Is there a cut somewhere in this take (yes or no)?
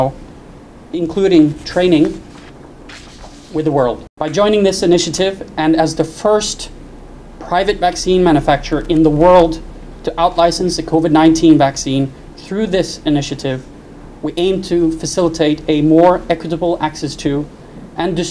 yes